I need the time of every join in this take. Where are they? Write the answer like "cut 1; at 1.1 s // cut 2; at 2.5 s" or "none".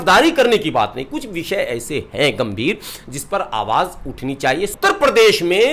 cut 1; at 4.7 s